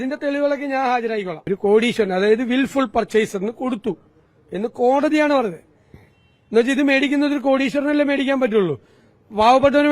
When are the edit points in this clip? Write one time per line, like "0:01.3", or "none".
0:01.4